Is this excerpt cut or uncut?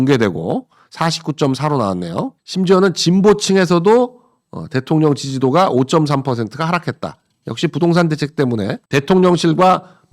cut